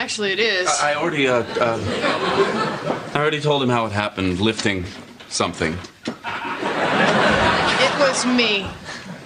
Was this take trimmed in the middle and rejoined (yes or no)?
no